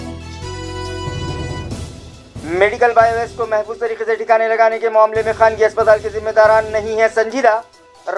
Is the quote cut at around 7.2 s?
no; 1 cut; at 1.9 s

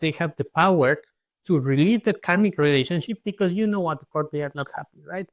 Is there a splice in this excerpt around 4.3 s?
no; 0 cuts

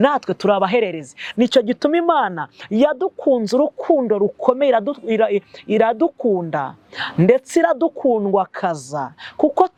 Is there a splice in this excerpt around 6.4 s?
no; 0 cuts

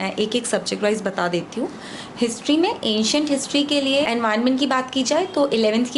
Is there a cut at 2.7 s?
no; 1 cut; at 4.1 s

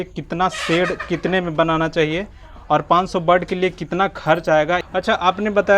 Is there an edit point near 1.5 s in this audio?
no; 1 cut; at 4.8 s

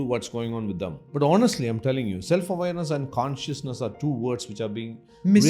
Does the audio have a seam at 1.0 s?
yes; 1 cut; at 1.0 s

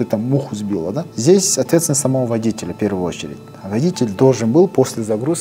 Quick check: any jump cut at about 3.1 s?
no; 1 cut; at 1.1 s

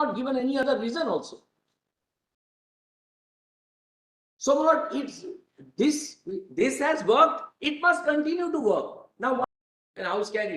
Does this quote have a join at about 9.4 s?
yes; 1 cut; at 9.4 s

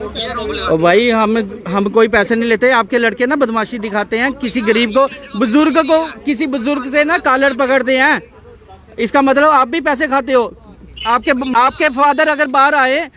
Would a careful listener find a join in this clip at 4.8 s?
no; 1 cut; at 11.5 s

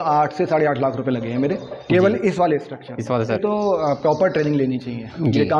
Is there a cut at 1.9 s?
no; 1 cut; at 3.4 s

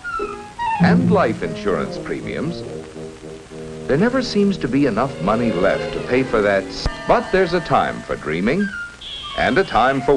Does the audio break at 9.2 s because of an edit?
no; 1 cut; at 2.9 s

